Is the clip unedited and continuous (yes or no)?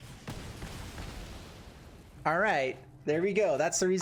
yes